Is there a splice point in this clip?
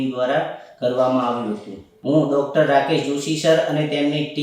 yes; 1 cut; at 1.9 s

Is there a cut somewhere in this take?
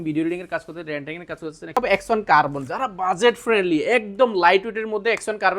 yes; 1 cut; at 1.8 s

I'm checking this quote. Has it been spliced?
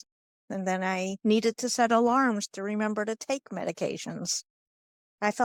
no; 0 cuts

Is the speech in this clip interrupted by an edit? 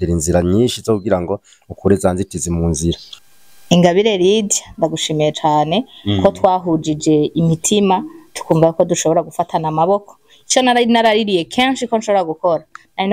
yes; 1 cut; at 3.1 s

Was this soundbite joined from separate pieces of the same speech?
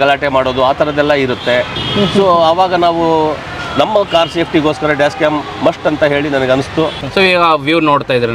yes; 2 cuts; at 1.8 s, 7.0 s

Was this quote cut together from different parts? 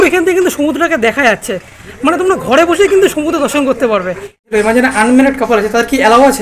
yes; 1 cut; at 4.5 s

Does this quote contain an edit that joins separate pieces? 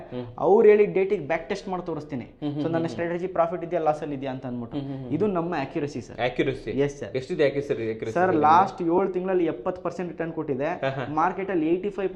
no; 0 cuts

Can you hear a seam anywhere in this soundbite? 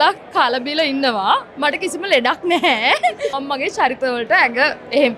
yes; 1 cut; at 3.4 s

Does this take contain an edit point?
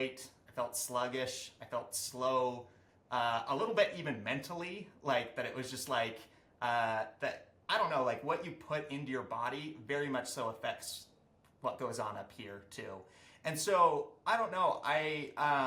no; 0 cuts

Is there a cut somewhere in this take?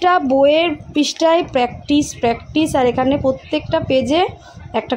no; 0 cuts

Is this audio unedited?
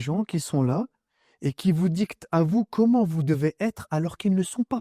yes; 0 cuts

